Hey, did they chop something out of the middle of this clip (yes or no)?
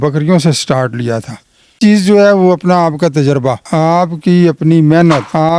yes